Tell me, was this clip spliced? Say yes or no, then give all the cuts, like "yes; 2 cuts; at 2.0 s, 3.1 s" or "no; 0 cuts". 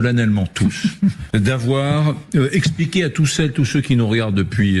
yes; 1 cut; at 1.2 s